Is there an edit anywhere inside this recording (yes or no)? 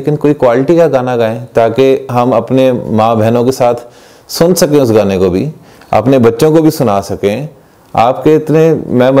no